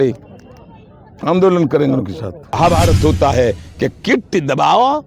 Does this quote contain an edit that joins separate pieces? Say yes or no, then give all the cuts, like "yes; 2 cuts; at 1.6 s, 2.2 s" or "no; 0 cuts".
yes; 1 cut; at 2.5 s